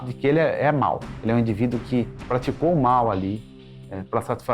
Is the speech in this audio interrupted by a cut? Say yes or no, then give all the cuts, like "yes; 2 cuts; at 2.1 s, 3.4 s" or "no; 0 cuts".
yes; 2 cuts; at 1.1 s, 2.2 s